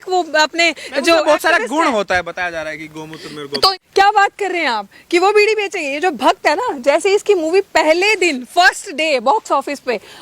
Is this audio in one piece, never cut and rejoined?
no; 1 cut; at 3.7 s

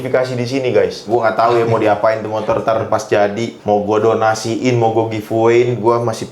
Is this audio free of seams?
no; 1 cut; at 1.0 s

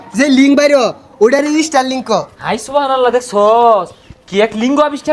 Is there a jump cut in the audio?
no; 0 cuts

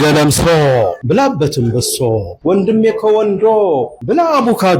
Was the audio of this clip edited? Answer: yes; 3 cuts; at 1.0 s, 2.3 s, 3.9 s

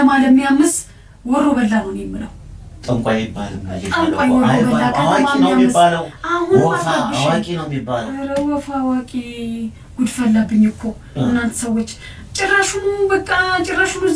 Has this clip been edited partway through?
no; 0 cuts

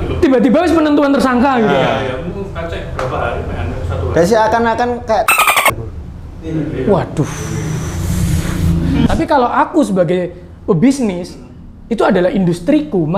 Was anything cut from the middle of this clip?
yes; 1 cut; at 9.1 s

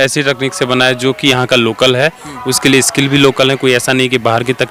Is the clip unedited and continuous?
yes; 0 cuts

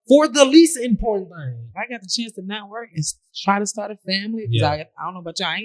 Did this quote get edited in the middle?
yes; 1 cut; at 1.7 s

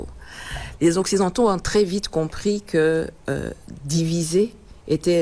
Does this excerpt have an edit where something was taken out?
no; 0 cuts

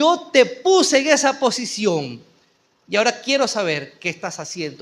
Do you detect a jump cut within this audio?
no; 0 cuts

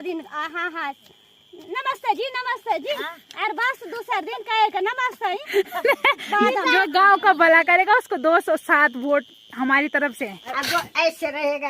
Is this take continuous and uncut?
no; 2 cuts; at 6.7 s, 10.5 s

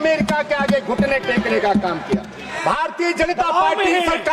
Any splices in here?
yes; 1 cut; at 2.4 s

